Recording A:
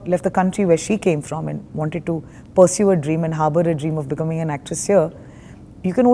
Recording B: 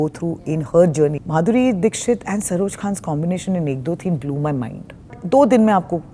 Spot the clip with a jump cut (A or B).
B